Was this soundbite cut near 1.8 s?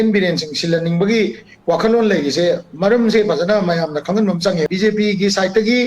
no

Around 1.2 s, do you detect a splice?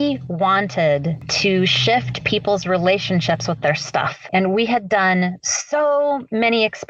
yes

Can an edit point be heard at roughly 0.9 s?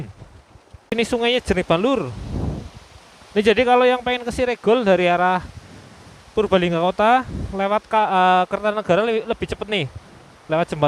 yes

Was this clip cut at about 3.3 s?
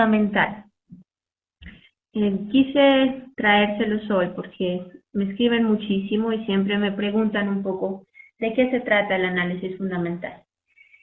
no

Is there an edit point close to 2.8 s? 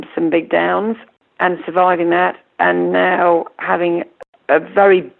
no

